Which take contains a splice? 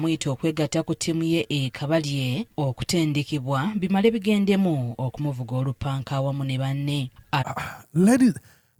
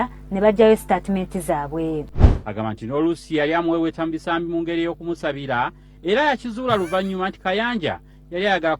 second; 1 cut; at 2.2 s

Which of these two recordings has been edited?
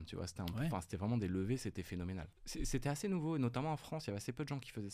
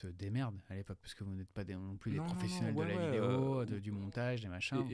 first; 1 cut; at 2.4 s

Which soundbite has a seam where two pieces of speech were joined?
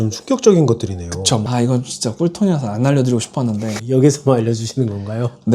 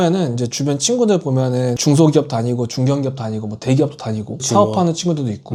first; 1 cut; at 1.5 s

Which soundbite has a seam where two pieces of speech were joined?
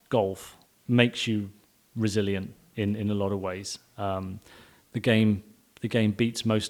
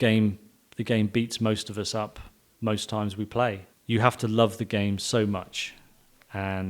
second; 1 cut; at 3.7 s

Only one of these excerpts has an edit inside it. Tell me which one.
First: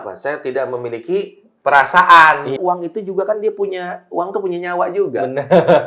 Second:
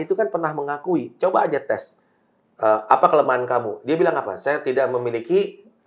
first; 1 cut; at 2.6 s

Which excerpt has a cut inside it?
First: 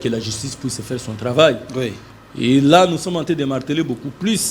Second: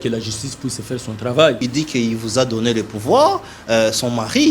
second; 1 cut; at 1.7 s

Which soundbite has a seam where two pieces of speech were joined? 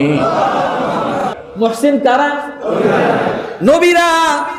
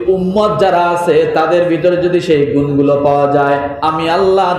first; 1 cut; at 1.3 s

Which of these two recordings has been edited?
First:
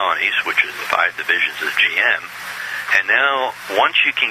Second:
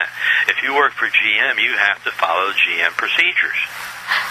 second; 1 cut; at 2.4 s

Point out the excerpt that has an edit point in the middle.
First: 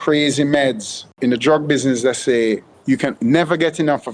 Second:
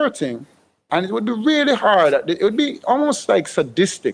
first; 2 cuts; at 1.1 s, 3.0 s

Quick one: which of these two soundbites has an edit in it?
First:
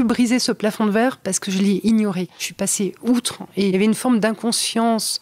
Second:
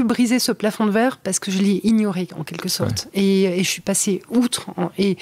first; 2 cuts; at 2.5 s, 3.4 s

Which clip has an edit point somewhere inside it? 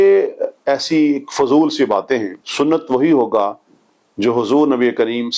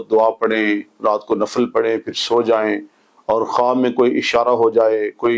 first; 1 cut; at 2.4 s

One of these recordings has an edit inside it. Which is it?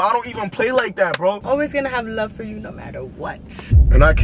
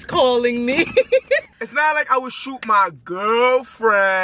first; 1 cut; at 1.4 s

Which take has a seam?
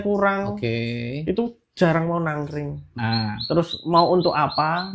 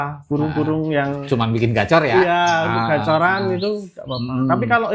first; 1 cut; at 2.9 s

